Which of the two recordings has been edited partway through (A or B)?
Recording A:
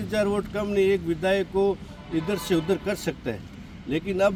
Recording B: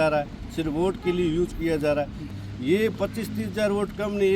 B